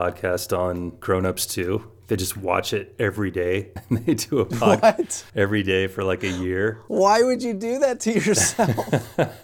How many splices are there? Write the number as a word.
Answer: four